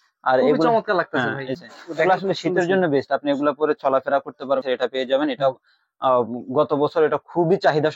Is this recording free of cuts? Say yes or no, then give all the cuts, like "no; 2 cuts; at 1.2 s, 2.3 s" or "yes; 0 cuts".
no; 2 cuts; at 1.6 s, 4.6 s